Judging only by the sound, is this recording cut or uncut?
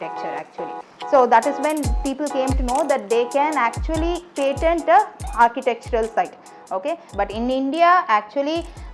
cut